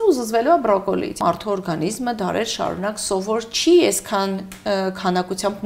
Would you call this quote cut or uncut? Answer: cut